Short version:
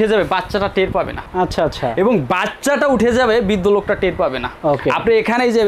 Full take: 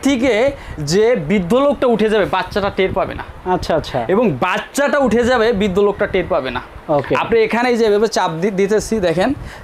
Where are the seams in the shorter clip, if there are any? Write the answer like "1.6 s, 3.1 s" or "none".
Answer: 1.2 s, 4.5 s